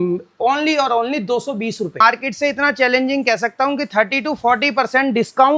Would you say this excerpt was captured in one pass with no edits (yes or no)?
no